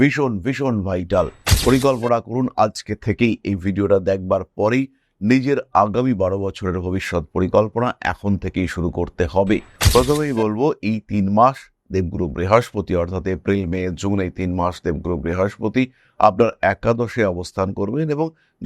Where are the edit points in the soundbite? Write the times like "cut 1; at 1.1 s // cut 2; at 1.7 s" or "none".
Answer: cut 1; at 9.8 s